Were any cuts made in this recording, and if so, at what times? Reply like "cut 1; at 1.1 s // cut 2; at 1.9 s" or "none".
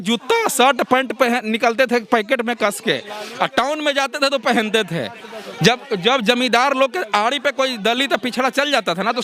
none